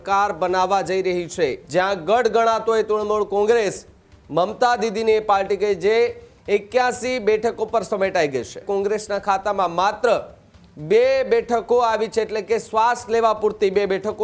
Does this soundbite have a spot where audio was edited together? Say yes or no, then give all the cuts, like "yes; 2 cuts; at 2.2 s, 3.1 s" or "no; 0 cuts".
yes; 2 cuts; at 1.6 s, 8.6 s